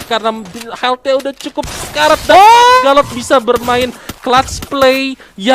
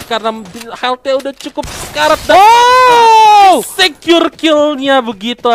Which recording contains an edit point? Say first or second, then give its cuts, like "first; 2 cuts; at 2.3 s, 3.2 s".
first; 1 cut; at 2.8 s